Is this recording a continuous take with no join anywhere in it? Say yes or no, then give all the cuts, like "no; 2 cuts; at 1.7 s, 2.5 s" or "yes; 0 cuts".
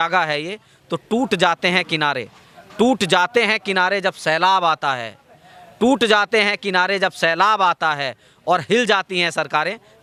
yes; 0 cuts